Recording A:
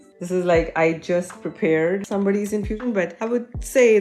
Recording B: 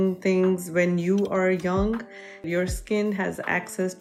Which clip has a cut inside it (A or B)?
A